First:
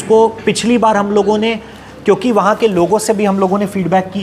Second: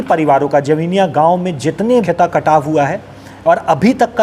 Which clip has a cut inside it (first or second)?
second